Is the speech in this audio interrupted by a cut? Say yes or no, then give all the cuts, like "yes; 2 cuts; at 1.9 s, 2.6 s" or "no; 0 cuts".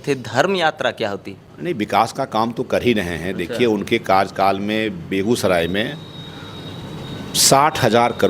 no; 0 cuts